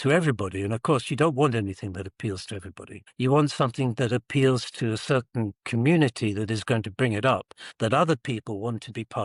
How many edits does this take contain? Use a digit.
0